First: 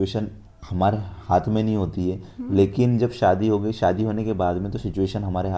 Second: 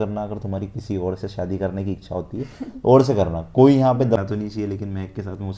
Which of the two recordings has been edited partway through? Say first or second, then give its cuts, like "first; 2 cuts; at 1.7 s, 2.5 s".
second; 1 cut; at 4.2 s